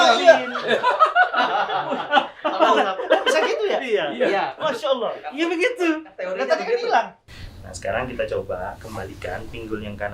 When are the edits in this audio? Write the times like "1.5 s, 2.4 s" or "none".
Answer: 7.2 s